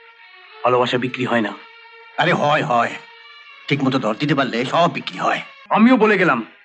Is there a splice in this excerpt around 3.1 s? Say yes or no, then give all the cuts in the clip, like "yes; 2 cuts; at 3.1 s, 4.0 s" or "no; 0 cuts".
no; 1 cut; at 5.5 s